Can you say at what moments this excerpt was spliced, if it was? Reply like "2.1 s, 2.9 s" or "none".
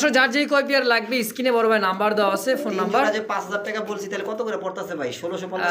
none